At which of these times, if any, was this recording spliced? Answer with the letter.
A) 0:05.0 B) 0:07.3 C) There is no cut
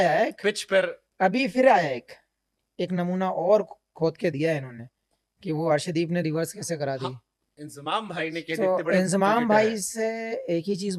C